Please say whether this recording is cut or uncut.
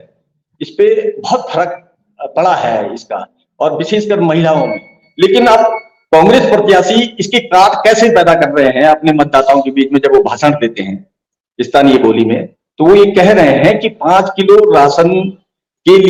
uncut